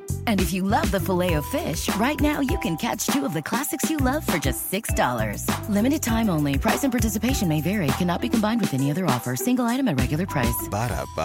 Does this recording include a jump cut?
no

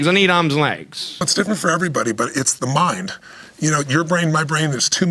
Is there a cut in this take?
yes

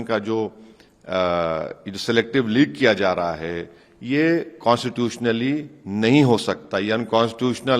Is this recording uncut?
yes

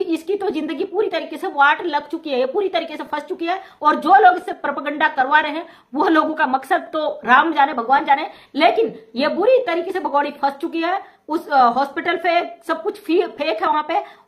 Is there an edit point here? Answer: no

